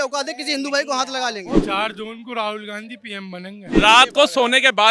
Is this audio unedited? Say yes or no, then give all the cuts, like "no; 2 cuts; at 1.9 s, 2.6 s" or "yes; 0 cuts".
no; 2 cuts; at 1.6 s, 3.7 s